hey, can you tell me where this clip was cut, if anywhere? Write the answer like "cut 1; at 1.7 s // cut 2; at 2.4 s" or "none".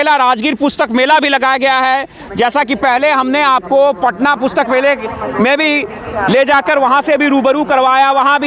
none